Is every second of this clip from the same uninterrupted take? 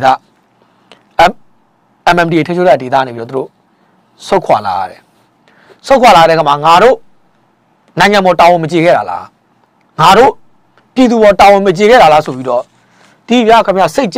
yes; 0 cuts

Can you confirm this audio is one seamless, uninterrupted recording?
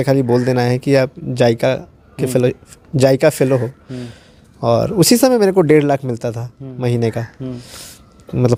yes; 0 cuts

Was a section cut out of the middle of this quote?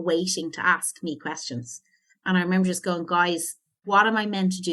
yes; 1 cut; at 3.8 s

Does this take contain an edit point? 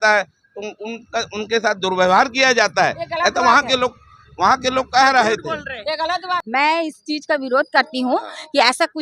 yes; 1 cut; at 6.2 s

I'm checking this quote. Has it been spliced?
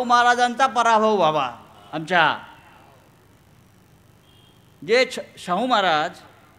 no; 0 cuts

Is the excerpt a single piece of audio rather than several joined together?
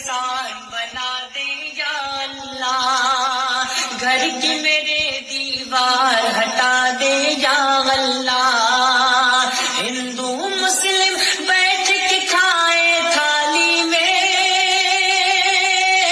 yes; 0 cuts

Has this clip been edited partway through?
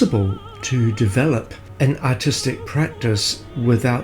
yes; 1 cut; at 1.6 s

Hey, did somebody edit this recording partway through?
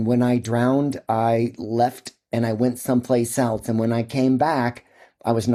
no; 0 cuts

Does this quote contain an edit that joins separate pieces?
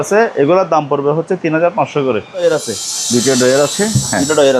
yes; 1 cut; at 2.4 s

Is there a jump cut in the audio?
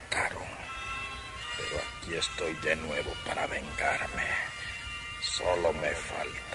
no; 0 cuts

